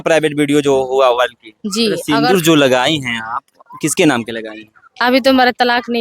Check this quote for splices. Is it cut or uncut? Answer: cut